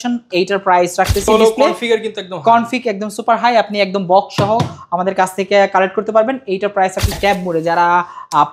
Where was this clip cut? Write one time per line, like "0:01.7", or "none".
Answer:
0:01.3
0:07.2